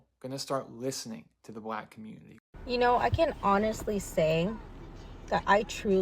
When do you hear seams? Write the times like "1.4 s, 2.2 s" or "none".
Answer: 2.3 s